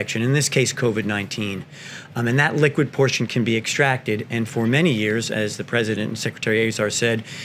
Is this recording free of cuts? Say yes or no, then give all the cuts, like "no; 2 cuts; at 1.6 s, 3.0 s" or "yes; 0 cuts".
yes; 0 cuts